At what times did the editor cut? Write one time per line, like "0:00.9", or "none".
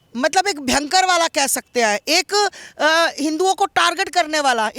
none